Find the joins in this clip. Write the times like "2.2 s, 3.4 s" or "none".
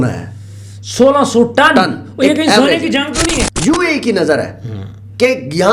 3.5 s